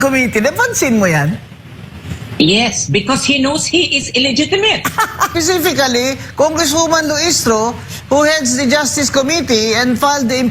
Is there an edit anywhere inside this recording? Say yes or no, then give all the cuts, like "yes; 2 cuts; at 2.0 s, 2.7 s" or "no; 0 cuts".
yes; 1 cut; at 5.3 s